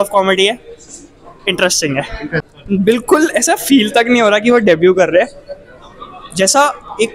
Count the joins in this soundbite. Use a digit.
1